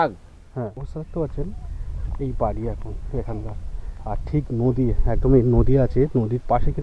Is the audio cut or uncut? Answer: cut